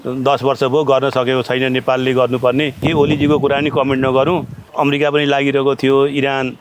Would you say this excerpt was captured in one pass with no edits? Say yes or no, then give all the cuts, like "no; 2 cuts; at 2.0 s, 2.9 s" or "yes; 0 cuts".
no; 2 cuts; at 2.8 s, 4.6 s